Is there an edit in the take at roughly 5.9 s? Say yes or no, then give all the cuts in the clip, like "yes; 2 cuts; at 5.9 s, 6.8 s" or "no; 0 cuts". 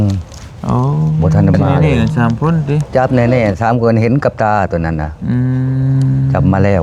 no; 1 cut; at 1.7 s